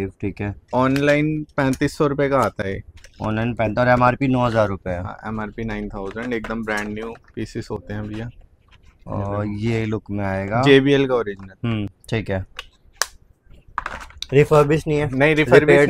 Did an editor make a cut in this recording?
no; 0 cuts

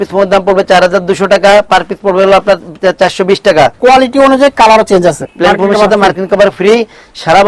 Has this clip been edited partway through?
yes; 2 cuts; at 3.8 s, 5.2 s

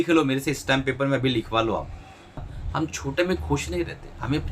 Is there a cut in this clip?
yes; 1 cut; at 2.4 s

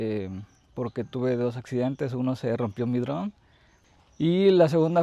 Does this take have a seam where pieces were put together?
yes; 1 cut; at 4.1 s

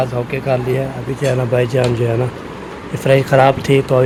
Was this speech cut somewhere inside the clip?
no; 0 cuts

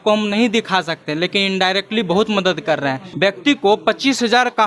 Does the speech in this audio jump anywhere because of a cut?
yes; 1 cut; at 3.0 s

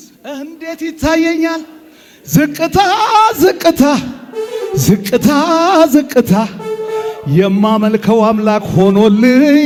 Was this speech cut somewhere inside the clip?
no; 0 cuts

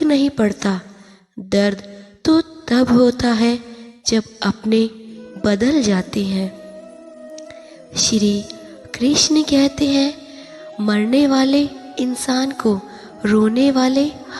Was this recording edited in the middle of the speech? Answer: yes; 2 cuts; at 6.6 s, 7.9 s

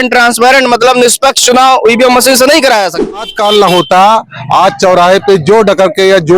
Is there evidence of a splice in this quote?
yes; 1 cut; at 3.2 s

